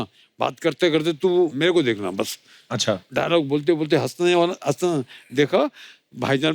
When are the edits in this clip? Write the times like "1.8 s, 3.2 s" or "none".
1.6 s, 3.1 s

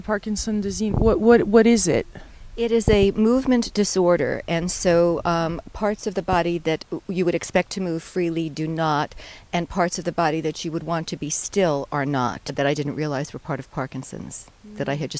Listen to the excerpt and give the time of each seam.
none

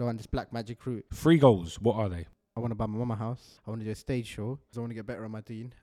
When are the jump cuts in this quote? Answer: 1.1 s, 3.4 s, 4.7 s

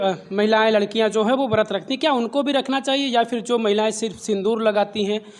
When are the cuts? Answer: none

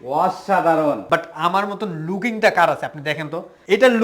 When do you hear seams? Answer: 1.0 s

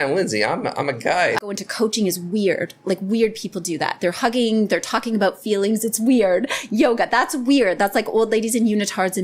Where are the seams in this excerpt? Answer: 1.4 s

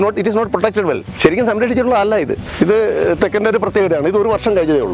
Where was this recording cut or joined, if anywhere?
1.1 s, 2.5 s

